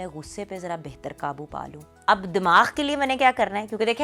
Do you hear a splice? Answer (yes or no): yes